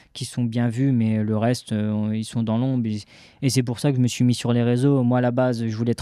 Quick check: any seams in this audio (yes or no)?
no